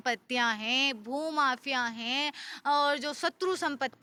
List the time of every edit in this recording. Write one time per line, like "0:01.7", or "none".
none